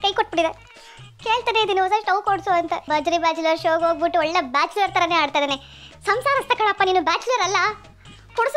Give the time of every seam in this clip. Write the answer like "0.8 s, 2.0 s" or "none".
2.8 s